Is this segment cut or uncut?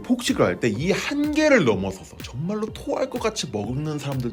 uncut